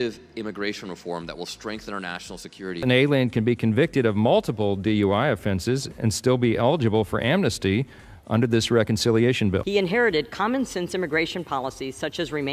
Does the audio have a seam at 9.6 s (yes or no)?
yes